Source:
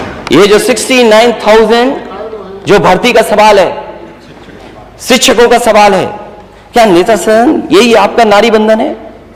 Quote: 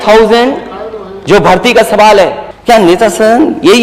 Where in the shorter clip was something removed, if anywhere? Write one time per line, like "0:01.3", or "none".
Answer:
0:02.5